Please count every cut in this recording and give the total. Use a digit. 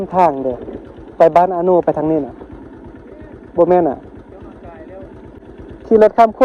1